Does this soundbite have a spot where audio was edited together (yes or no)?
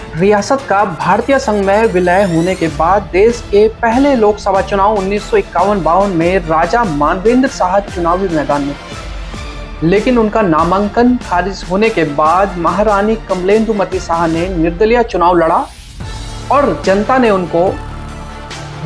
no